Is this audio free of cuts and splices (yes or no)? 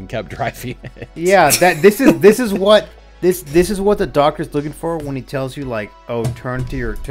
yes